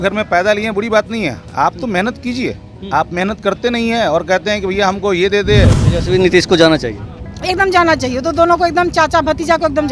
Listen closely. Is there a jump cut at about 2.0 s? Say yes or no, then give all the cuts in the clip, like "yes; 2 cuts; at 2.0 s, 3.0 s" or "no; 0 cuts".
no; 1 cut; at 5.8 s